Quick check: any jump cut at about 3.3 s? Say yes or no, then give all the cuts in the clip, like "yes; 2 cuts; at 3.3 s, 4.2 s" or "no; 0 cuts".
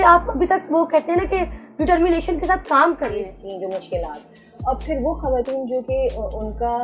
yes; 1 cut; at 3.3 s